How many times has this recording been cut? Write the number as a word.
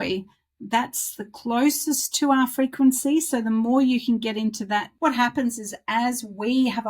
one